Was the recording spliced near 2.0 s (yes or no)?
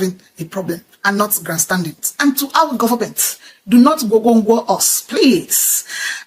yes